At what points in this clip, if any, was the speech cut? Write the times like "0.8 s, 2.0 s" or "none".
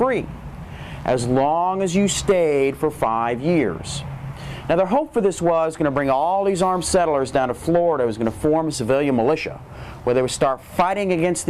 4.8 s